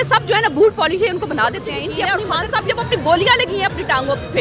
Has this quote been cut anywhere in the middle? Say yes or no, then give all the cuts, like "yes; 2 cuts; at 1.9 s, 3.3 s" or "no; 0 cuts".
yes; 1 cut; at 1.8 s